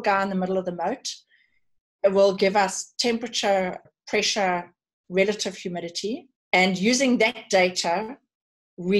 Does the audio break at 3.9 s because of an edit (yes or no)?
yes